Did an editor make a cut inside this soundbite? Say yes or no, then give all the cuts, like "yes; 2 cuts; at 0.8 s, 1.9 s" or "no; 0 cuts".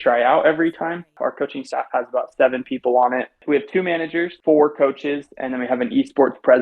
yes; 3 cuts; at 1.2 s, 3.4 s, 4.3 s